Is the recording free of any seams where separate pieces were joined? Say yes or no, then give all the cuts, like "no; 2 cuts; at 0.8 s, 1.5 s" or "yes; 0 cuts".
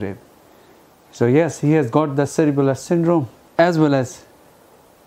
no; 1 cut; at 3.4 s